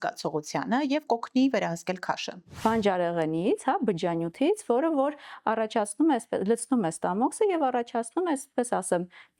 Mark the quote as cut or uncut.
cut